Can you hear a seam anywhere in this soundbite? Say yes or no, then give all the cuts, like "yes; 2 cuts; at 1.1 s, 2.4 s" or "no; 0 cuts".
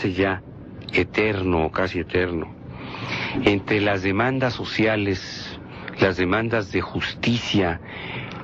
yes; 1 cut; at 6.2 s